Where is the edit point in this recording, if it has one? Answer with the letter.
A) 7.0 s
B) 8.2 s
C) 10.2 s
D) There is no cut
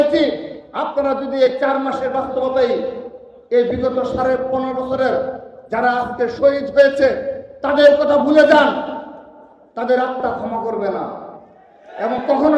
D